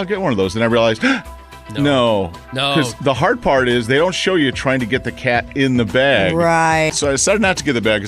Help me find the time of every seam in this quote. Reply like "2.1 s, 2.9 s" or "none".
6.9 s